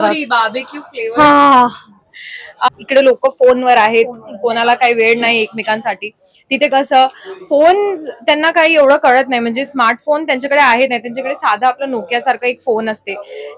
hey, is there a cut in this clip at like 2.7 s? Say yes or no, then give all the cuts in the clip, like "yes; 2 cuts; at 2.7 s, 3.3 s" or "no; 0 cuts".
yes; 1 cut; at 2.7 s